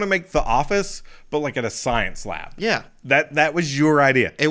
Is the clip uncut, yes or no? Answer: yes